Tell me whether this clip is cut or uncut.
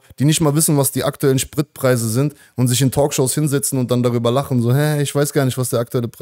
uncut